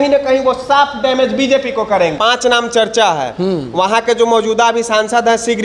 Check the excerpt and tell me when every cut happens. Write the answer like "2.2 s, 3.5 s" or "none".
2.1 s